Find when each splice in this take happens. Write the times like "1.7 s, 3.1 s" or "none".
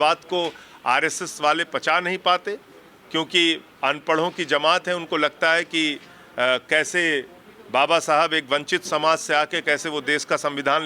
none